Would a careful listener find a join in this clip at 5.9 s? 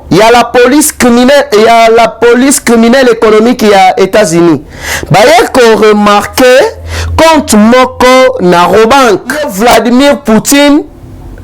no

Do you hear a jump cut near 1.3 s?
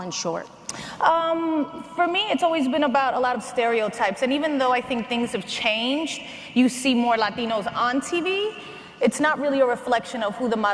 yes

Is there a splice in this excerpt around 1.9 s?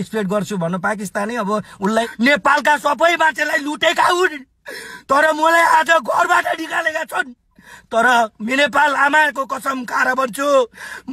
yes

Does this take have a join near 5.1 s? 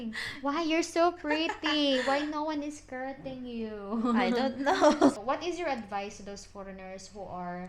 yes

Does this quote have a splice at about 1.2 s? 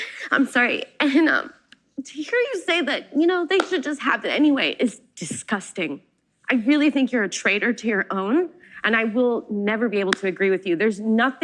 no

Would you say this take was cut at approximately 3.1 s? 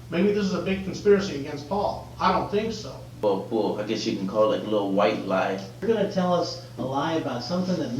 yes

